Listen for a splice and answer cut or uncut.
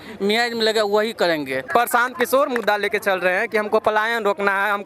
cut